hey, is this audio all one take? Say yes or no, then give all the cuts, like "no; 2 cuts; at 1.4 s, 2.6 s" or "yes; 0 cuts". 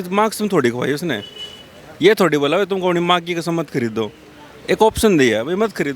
yes; 0 cuts